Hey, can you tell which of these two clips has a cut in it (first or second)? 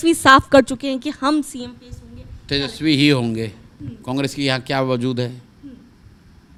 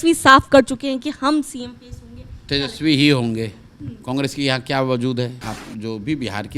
second